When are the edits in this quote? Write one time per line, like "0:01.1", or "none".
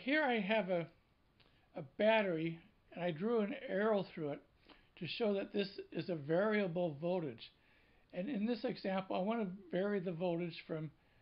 0:02.2

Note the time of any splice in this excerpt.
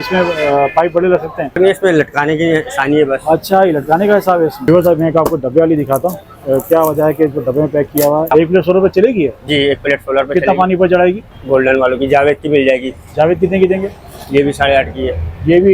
0:01.6
0:04.7
0:08.3
0:11.3

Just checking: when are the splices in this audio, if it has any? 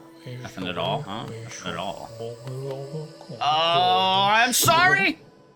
none

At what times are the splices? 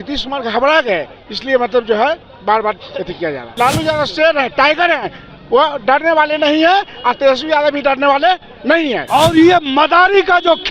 0:03.5
0:09.0

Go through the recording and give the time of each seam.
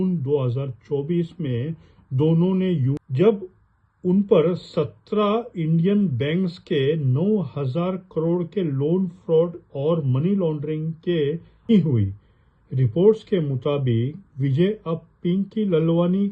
0:03.0
0:11.7

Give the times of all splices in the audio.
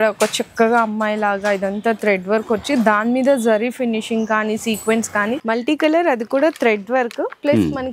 0:05.4

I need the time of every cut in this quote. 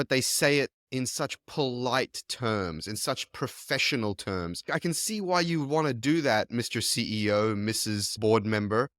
0:04.6
0:08.1

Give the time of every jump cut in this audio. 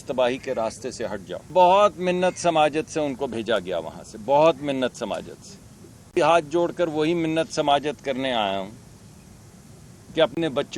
0:01.5
0:06.2

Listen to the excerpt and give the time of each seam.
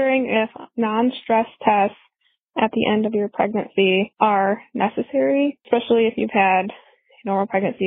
0:04.1
0:05.6

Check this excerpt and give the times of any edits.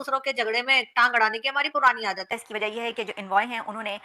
0:02.4

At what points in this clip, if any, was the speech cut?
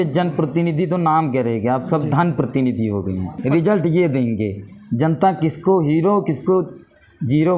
0:03.4

